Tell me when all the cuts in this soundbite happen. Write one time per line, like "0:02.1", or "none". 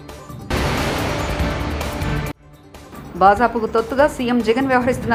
none